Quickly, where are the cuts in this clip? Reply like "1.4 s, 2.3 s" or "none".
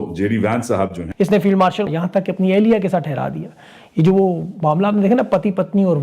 1.0 s, 1.9 s